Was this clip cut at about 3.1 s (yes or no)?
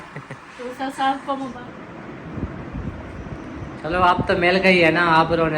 no